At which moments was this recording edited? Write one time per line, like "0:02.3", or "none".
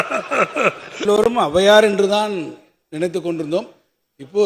0:01.0